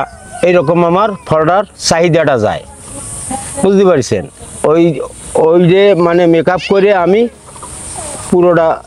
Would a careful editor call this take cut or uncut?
uncut